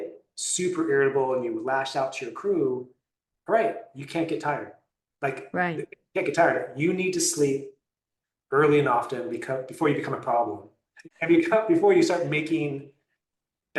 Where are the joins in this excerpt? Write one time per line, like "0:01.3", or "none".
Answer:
none